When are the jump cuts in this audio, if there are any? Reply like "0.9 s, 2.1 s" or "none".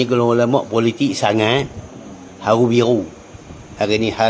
none